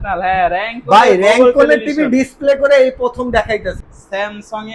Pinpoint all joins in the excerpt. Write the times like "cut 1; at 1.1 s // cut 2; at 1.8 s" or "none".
cut 1; at 3.8 s